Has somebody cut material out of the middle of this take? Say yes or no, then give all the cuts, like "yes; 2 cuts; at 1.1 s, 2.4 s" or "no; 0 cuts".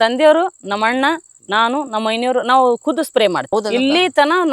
no; 0 cuts